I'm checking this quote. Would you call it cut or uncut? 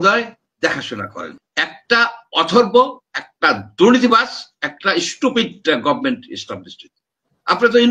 cut